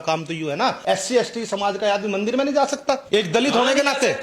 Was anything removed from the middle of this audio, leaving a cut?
yes; 2 cuts; at 0.8 s, 3.0 s

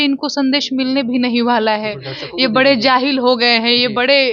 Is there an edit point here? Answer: no; 0 cuts

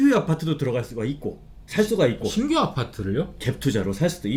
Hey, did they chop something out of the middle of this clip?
no; 0 cuts

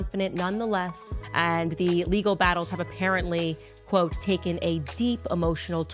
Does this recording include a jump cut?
no; 0 cuts

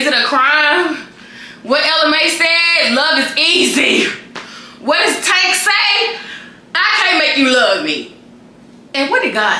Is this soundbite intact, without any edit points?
yes; 0 cuts

